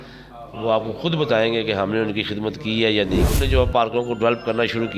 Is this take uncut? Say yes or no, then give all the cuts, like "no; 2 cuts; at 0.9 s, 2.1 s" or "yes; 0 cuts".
no; 1 cut; at 3.3 s